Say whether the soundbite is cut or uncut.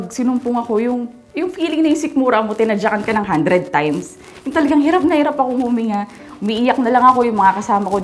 uncut